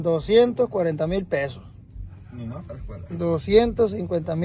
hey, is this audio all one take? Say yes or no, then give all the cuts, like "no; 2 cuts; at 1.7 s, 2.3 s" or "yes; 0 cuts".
yes; 0 cuts